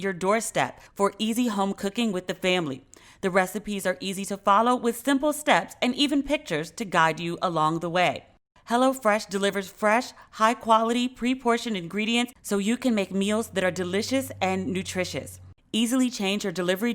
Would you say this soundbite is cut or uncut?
cut